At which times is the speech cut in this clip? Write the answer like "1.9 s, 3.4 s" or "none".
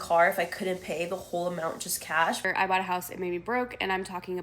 2.5 s